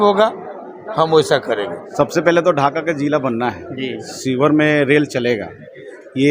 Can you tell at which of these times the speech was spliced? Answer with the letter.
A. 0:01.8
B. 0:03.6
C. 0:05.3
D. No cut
A